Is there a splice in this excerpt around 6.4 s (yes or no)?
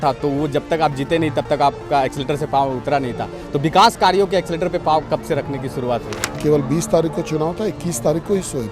yes